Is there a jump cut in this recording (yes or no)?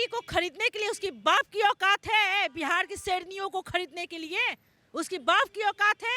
no